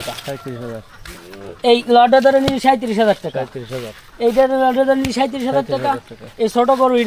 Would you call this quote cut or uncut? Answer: uncut